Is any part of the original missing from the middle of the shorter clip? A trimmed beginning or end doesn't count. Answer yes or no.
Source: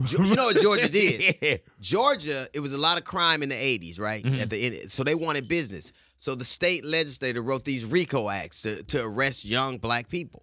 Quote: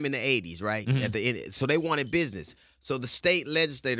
no